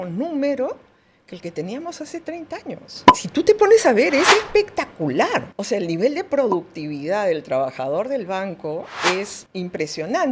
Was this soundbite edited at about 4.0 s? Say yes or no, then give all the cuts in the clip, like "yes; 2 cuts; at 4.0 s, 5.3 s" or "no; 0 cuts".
no; 2 cuts; at 5.5 s, 9.4 s